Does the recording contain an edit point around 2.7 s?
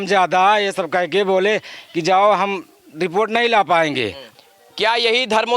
no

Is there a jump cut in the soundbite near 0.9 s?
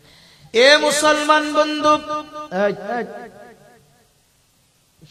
no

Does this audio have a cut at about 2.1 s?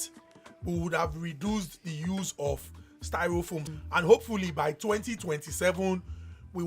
no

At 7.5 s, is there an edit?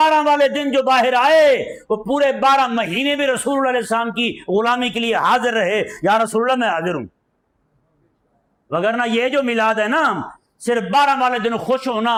no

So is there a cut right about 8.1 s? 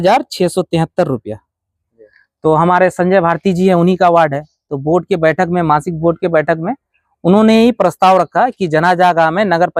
no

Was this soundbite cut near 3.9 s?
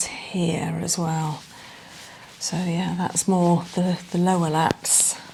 no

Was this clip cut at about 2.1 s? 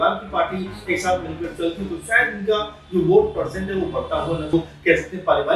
no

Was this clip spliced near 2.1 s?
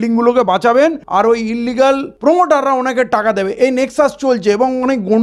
yes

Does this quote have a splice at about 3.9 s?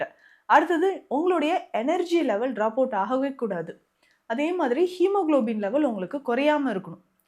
no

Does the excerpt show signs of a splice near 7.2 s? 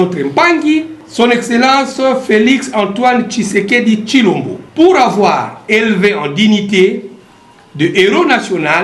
no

